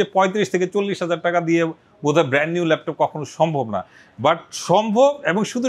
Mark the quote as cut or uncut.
uncut